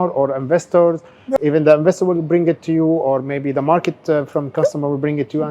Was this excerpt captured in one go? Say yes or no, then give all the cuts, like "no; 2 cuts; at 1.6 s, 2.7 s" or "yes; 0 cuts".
no; 1 cut; at 1.2 s